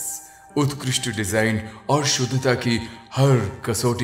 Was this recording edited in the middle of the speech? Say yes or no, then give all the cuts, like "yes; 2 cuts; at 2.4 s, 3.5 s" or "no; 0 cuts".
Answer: no; 0 cuts